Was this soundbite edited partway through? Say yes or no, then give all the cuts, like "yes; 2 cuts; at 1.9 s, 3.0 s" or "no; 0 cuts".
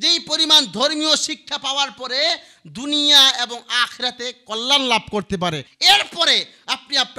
yes; 1 cut; at 5.7 s